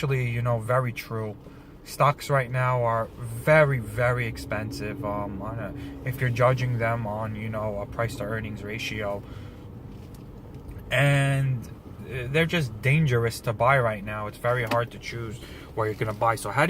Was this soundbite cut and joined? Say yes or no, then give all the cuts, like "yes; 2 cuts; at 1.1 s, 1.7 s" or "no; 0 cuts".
yes; 1 cut; at 4.8 s